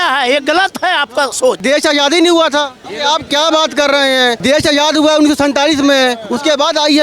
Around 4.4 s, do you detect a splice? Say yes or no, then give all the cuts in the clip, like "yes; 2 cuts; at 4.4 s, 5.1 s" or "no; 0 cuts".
yes; 3 cuts; at 1.6 s, 2.8 s, 4.4 s